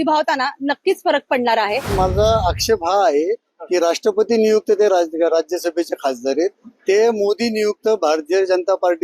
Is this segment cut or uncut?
cut